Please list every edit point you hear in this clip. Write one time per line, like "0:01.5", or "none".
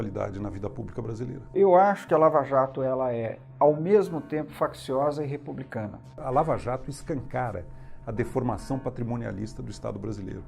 0:01.5
0:06.1